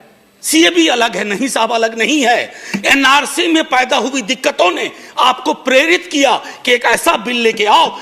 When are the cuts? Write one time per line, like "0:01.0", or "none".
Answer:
none

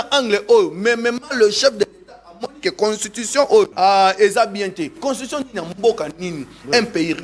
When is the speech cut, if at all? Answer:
0:03.7
0:05.0

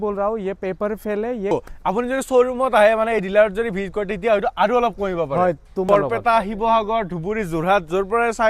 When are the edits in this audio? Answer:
0:01.5
0:05.8

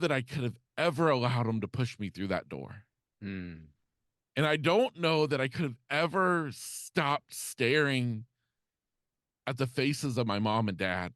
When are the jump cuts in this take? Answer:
none

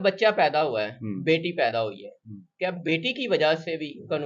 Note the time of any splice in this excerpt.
none

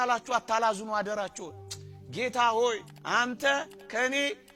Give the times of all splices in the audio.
none

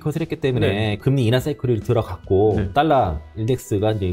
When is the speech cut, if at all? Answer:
0:01.0
0:02.7

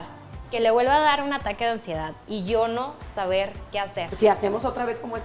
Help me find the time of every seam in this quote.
0:04.0

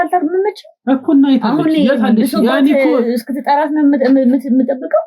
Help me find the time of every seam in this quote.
none

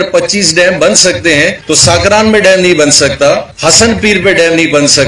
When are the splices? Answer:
0:01.6
0:03.5

